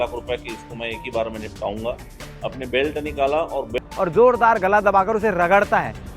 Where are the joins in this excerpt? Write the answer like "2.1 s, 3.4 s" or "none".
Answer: 3.8 s